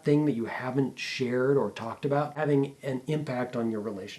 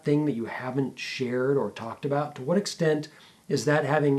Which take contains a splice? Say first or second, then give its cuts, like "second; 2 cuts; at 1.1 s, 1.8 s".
first; 1 cut; at 2.4 s